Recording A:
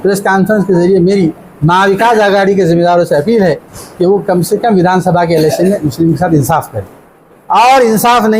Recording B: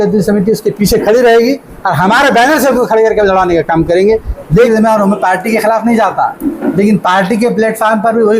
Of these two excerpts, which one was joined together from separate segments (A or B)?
B